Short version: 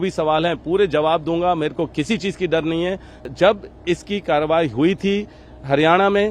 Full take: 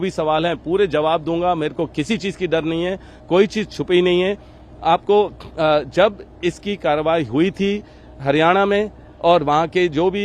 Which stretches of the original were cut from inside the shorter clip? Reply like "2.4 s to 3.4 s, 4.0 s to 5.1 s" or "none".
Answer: 3.3 s to 5.8 s